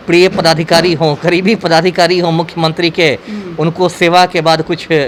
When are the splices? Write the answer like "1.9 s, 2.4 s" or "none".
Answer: none